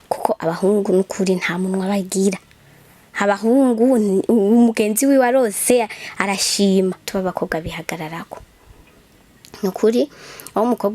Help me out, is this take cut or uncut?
cut